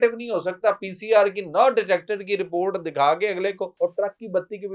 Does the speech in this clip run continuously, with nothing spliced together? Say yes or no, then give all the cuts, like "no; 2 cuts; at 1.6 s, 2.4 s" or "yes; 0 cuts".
no; 1 cut; at 3.7 s